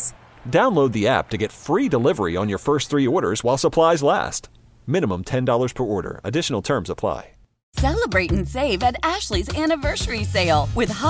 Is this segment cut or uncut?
cut